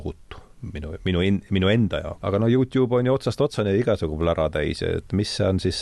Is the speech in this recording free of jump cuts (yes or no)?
no